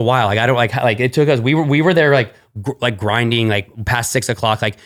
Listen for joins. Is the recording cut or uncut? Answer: uncut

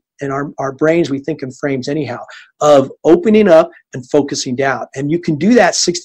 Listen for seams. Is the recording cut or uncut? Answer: uncut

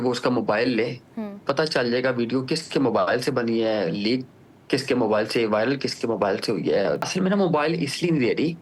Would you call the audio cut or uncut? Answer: cut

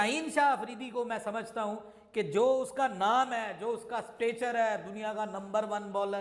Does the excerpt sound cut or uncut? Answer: uncut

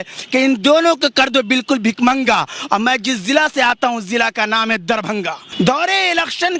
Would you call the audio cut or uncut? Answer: cut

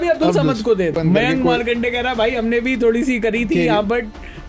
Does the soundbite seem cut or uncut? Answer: cut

